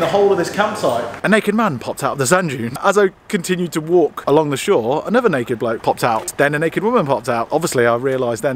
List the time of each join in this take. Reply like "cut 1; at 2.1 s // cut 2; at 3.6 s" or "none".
cut 1; at 1.1 s // cut 2; at 2.8 s // cut 3; at 6.3 s // cut 4; at 7.5 s